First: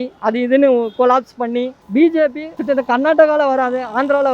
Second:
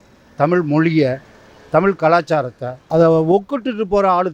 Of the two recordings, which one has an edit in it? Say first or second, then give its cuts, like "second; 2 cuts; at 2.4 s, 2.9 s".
first; 2 cuts; at 1.8 s, 2.5 s